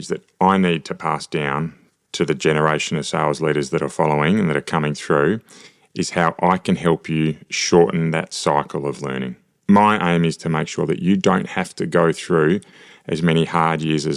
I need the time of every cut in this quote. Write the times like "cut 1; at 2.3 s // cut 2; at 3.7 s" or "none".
none